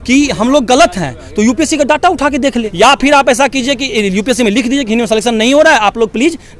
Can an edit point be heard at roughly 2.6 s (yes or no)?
yes